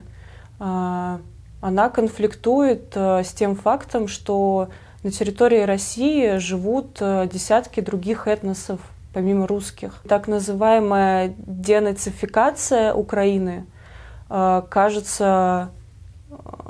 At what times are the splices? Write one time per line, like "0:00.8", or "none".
0:10.1